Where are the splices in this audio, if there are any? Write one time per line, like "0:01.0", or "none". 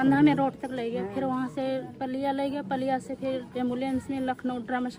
none